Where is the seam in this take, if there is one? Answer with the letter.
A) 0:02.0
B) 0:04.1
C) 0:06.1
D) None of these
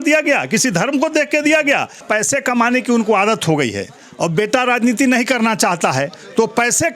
A